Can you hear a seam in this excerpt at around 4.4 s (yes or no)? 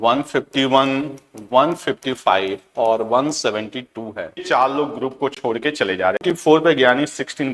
yes